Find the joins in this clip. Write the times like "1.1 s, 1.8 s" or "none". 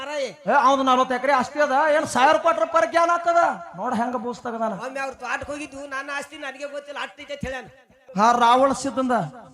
8.0 s